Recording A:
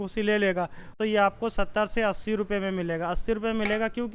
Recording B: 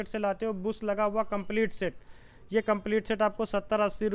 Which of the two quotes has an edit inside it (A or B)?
A